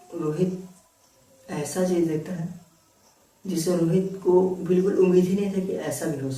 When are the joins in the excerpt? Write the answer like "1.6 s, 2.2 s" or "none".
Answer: none